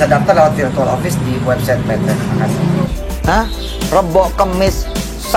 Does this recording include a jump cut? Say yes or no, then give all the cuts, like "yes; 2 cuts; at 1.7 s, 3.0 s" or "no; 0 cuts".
yes; 1 cut; at 2.9 s